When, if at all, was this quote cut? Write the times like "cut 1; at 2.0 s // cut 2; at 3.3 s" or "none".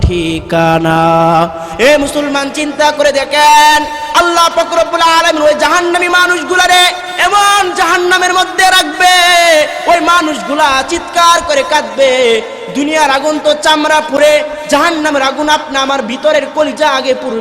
cut 1; at 1.6 s